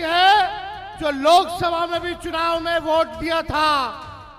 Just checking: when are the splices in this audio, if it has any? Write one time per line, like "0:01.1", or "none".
none

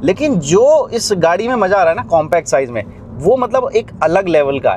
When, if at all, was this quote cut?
none

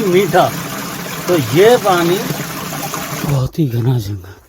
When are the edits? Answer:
0:03.2

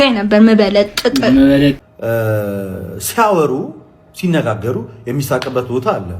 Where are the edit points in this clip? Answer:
0:01.9

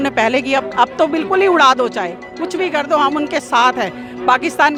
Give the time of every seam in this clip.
none

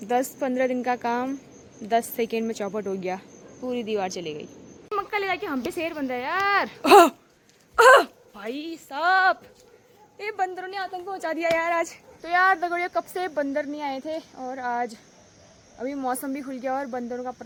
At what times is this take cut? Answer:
none

